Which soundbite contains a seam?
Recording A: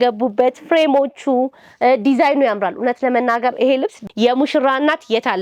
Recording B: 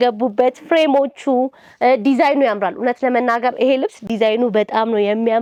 A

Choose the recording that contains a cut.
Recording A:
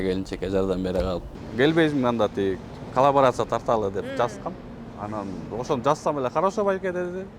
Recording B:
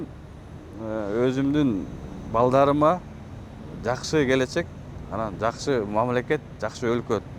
A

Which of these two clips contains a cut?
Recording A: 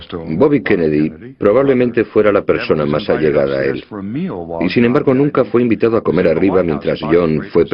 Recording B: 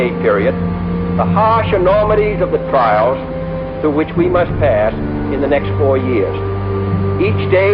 A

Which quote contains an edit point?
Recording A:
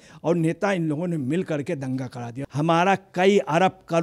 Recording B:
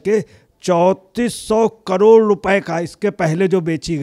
A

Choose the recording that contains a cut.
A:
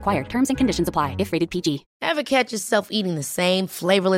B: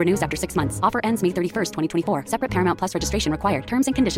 A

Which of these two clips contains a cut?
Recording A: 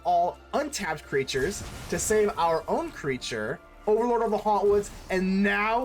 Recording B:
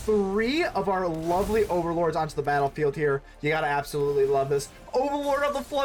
A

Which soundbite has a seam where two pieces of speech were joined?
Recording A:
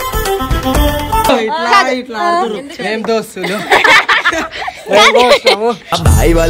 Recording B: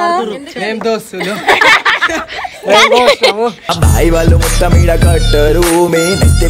A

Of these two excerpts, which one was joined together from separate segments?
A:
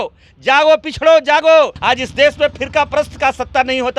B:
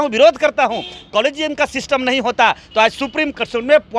A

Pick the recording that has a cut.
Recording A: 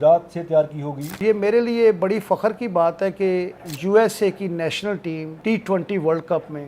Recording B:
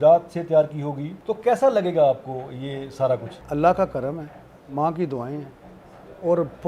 A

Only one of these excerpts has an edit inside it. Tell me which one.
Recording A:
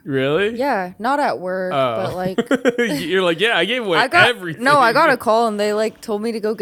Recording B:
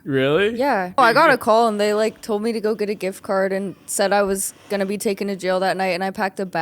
B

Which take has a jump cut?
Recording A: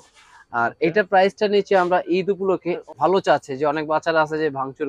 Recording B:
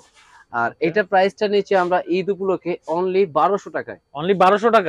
A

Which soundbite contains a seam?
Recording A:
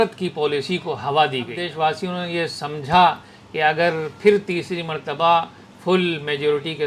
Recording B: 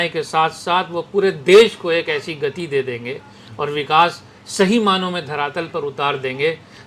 A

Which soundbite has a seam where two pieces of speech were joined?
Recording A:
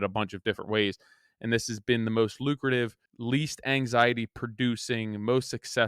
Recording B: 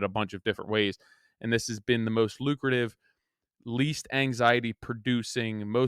A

